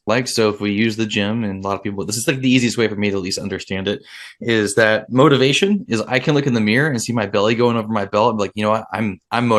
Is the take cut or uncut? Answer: uncut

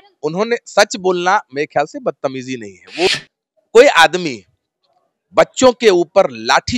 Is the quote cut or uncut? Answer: cut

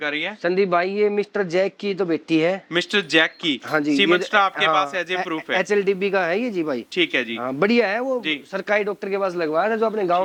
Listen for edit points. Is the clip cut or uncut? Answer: uncut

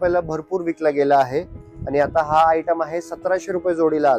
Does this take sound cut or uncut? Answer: uncut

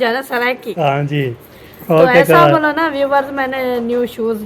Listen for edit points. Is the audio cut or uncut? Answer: uncut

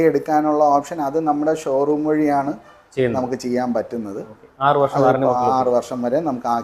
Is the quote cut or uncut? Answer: uncut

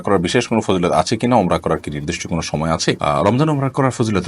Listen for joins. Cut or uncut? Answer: uncut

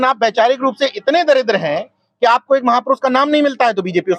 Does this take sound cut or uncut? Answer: uncut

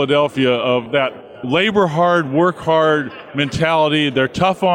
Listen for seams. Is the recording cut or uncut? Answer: cut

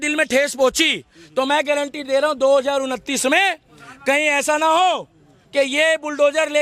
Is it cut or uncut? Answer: uncut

